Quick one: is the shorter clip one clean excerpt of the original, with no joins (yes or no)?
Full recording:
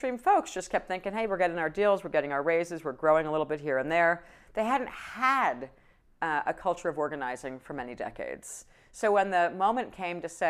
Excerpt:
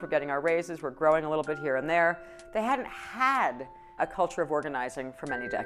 no